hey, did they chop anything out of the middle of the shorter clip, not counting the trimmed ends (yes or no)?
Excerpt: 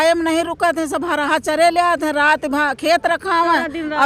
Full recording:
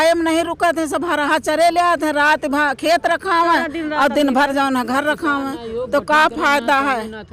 no